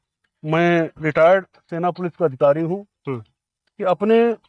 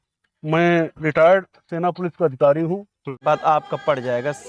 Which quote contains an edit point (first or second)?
second